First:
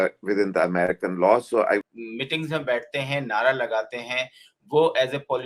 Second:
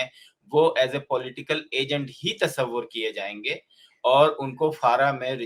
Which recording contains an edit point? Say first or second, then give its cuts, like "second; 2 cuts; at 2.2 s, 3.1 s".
first; 1 cut; at 1.8 s